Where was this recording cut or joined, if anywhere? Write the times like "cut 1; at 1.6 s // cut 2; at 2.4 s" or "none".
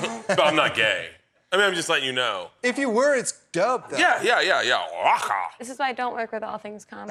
none